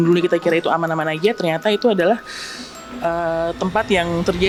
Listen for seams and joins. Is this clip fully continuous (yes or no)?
yes